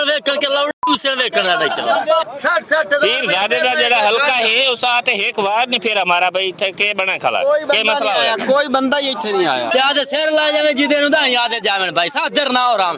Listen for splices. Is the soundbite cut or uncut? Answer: cut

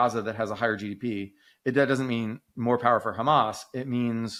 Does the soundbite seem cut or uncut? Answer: uncut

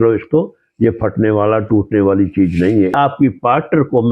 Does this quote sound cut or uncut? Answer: cut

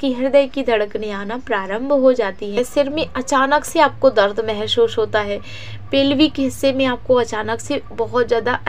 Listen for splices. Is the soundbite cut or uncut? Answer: cut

